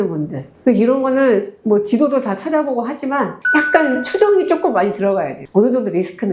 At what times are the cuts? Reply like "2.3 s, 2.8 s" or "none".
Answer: none